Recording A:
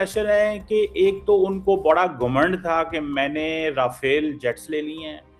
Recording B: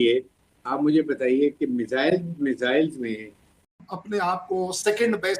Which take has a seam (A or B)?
B